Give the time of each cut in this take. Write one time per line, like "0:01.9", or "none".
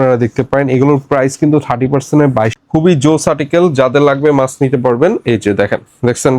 0:02.6